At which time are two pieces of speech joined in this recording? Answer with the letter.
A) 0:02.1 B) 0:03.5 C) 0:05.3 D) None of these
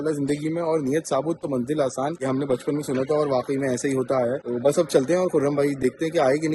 D